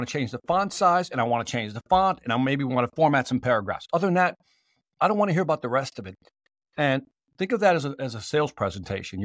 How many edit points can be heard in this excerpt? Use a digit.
0